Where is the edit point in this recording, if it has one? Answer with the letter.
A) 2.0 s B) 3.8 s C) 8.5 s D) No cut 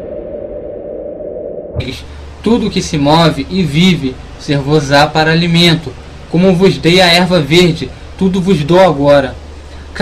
D